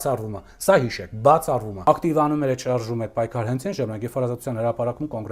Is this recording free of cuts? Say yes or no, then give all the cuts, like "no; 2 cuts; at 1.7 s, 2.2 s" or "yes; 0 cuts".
no; 1 cut; at 1.7 s